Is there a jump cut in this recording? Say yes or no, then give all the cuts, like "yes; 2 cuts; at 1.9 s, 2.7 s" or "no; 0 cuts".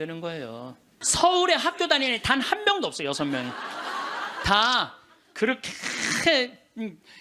yes; 1 cut; at 0.9 s